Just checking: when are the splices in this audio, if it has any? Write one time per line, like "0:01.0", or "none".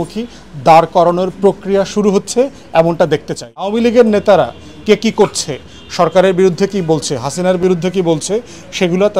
0:03.7